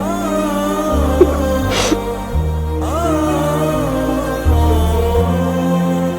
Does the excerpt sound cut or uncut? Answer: uncut